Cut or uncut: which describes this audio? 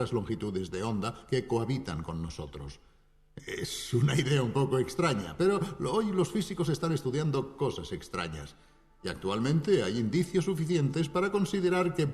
cut